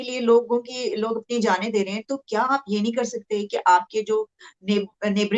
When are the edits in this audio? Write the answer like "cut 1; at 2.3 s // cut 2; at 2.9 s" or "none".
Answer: none